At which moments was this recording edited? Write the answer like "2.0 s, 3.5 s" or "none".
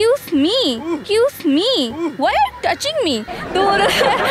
none

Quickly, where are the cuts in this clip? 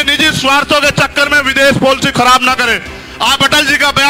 none

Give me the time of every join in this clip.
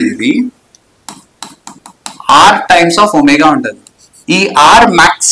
none

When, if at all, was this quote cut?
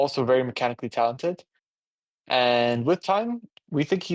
none

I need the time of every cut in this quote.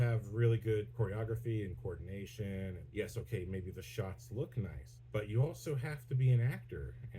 0.9 s, 2.8 s, 4.9 s

